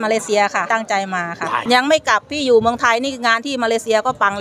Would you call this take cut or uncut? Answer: cut